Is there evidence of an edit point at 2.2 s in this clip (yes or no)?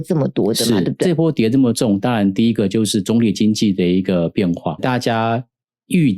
no